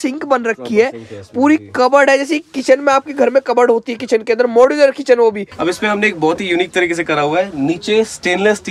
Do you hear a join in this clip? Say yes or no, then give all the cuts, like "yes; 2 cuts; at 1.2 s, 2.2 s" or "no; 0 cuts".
yes; 1 cut; at 5.5 s